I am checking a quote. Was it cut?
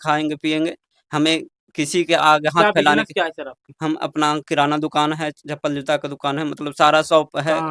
no; 0 cuts

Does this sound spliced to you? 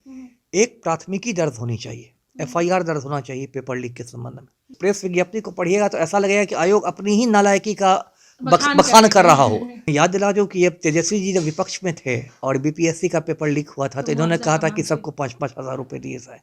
yes; 2 cuts; at 4.6 s, 9.7 s

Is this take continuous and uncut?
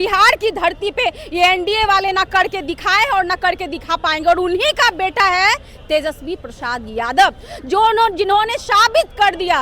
yes; 0 cuts

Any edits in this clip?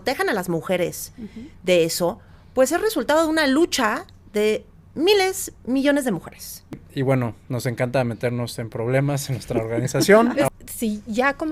yes; 2 cuts; at 6.8 s, 10.5 s

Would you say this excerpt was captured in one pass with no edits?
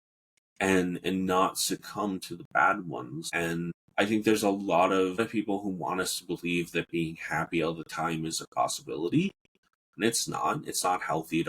no; 2 cuts; at 3.5 s, 5.2 s

